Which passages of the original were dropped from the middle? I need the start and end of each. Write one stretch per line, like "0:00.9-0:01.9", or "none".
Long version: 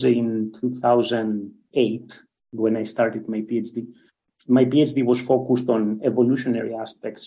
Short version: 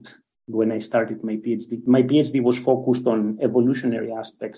0:03.8-0:04.3